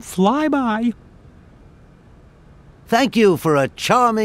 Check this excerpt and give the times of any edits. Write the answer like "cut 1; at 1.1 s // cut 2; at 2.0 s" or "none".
cut 1; at 1.0 s // cut 2; at 2.8 s